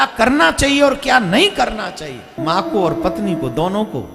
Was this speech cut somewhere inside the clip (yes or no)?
yes